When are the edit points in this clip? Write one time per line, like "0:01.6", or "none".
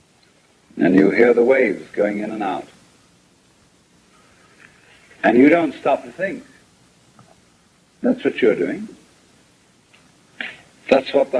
0:04.2